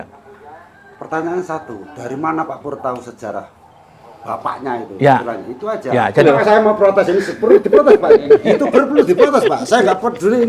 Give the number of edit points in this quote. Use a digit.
1